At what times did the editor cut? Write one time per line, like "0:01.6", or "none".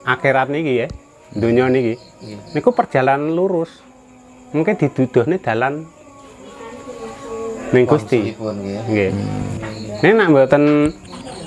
0:09.6